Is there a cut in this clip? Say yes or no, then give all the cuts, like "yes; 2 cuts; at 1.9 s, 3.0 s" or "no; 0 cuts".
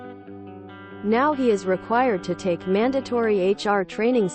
yes; 1 cut; at 1.0 s